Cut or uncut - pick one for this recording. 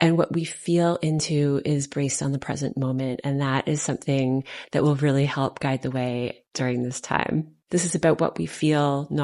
cut